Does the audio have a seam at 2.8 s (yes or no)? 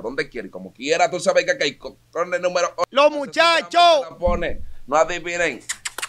yes